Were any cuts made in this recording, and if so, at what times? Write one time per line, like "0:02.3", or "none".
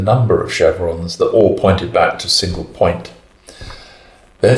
none